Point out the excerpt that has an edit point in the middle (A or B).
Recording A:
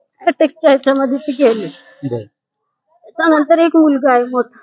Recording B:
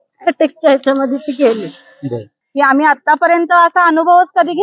B